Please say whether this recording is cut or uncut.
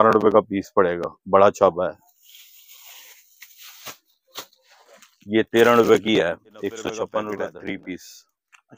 cut